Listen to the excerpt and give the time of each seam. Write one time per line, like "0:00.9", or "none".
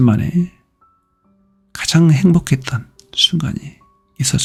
none